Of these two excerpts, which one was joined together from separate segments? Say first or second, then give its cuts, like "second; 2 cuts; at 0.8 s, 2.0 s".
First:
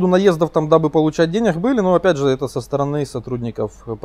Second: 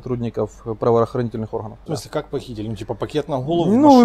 second; 1 cut; at 1.8 s